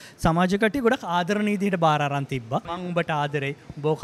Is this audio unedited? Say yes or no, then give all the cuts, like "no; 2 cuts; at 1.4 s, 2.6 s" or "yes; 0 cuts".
no; 1 cut; at 2.8 s